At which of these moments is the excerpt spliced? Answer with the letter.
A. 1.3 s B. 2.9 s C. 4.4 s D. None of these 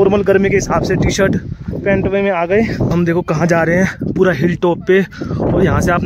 B